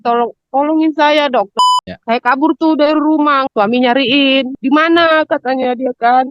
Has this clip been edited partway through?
yes; 3 cuts; at 1.5 s, 3.5 s, 4.5 s

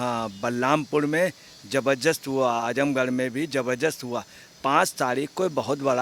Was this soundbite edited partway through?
no; 0 cuts

